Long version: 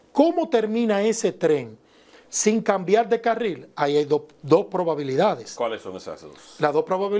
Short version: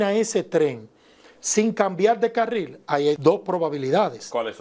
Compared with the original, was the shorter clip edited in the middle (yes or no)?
yes